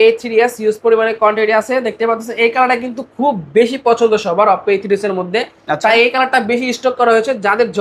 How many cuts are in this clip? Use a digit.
0